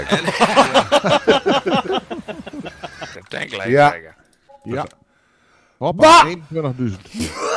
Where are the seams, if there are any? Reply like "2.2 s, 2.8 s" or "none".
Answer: 3.1 s